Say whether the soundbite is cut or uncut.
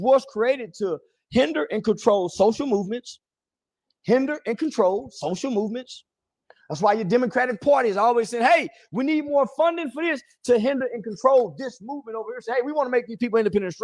uncut